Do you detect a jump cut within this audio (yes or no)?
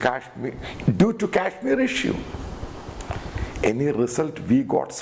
no